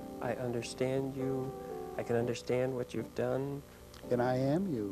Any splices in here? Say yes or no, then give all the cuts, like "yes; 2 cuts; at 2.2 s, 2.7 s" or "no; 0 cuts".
yes; 1 cut; at 3.9 s